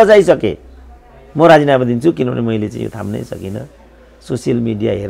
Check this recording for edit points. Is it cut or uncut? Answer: uncut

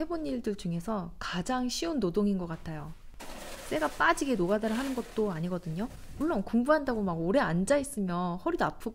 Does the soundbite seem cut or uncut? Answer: uncut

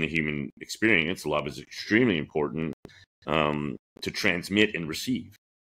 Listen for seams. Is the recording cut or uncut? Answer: uncut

